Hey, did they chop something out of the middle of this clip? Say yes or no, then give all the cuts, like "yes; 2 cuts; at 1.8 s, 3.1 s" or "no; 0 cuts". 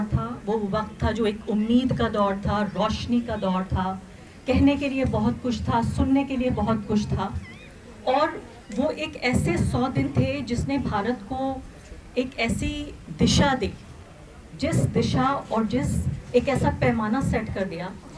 no; 0 cuts